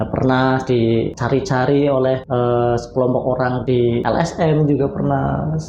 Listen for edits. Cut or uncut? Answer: cut